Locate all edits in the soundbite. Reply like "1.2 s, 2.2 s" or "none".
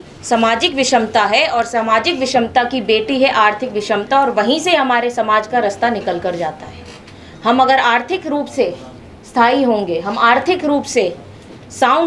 none